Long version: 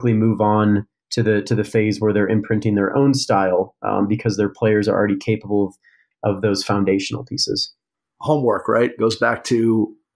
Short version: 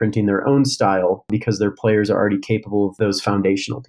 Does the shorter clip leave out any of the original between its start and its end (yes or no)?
yes